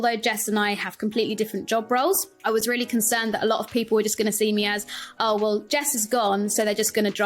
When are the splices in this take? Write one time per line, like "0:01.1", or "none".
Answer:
0:02.3